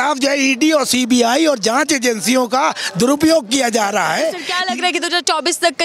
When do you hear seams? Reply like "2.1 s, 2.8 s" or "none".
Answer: 4.5 s